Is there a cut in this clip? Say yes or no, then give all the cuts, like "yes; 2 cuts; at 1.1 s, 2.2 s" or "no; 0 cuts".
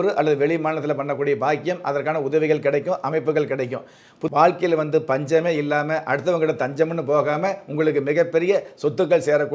yes; 1 cut; at 4.2 s